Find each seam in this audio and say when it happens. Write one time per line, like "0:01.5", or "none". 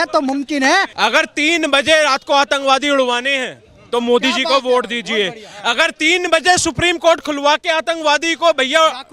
0:00.9